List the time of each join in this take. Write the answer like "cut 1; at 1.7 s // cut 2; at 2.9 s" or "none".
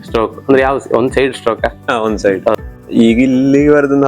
cut 1; at 2.6 s